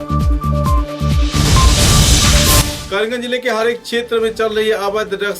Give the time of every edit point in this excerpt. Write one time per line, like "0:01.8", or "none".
0:02.7